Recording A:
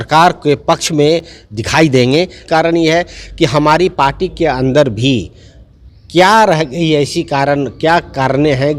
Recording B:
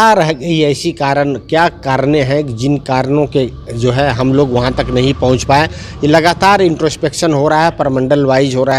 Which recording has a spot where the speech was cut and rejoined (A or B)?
A